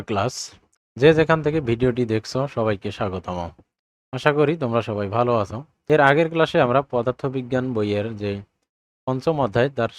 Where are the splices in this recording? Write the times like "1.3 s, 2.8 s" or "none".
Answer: 5.7 s